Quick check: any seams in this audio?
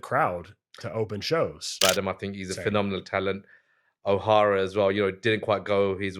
yes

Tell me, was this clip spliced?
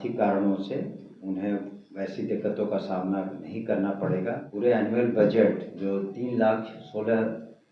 yes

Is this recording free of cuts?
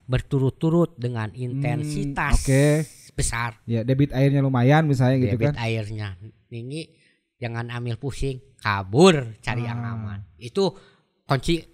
yes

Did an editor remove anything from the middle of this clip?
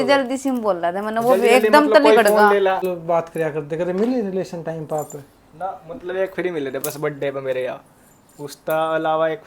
yes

